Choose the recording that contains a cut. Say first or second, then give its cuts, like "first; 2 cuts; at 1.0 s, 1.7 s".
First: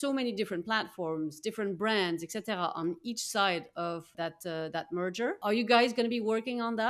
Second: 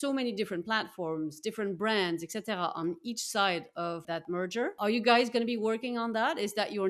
second; 1 cut; at 4.2 s